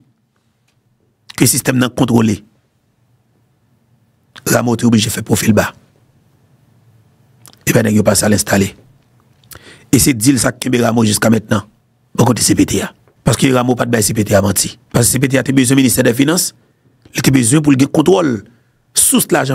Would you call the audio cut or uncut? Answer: cut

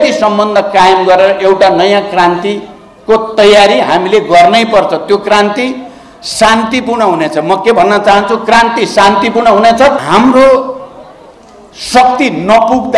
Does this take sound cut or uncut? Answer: cut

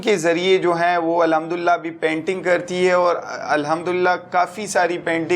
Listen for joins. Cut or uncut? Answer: uncut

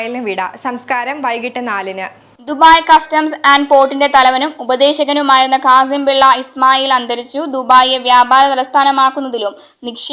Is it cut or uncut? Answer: uncut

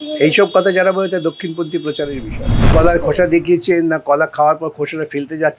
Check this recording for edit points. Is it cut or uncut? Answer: cut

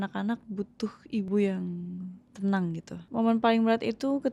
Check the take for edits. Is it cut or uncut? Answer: cut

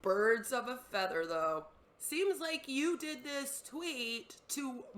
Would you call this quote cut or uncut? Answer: cut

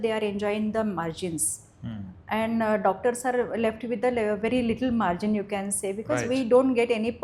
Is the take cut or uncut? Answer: uncut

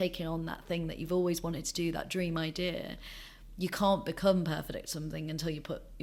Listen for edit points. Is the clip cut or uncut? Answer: uncut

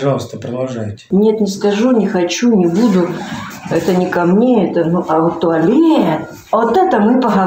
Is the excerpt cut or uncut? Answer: cut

